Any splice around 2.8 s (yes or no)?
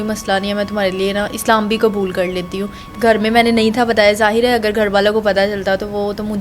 yes